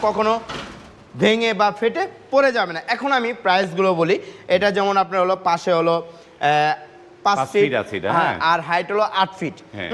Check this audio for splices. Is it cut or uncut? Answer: uncut